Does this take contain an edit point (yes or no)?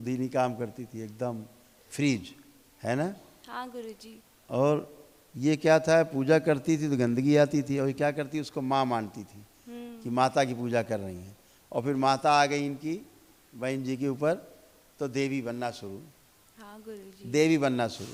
no